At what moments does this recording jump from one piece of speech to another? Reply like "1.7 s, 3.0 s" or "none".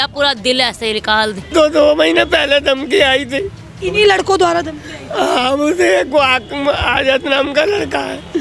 1.5 s